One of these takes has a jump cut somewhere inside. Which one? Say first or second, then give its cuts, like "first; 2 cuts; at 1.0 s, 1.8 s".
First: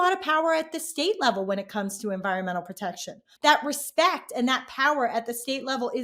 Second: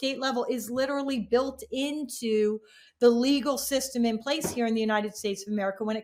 first; 1 cut; at 3.2 s